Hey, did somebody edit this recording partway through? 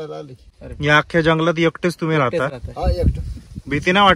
no; 0 cuts

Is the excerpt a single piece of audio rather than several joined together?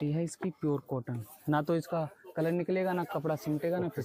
yes; 0 cuts

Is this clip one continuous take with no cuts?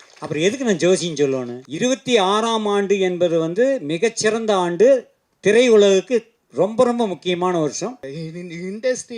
no; 2 cuts; at 1.6 s, 8.1 s

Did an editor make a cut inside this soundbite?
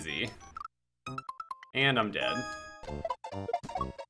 yes; 1 cut; at 2.8 s

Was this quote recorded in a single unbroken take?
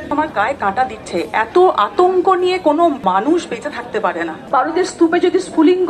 no; 1 cut; at 4.4 s

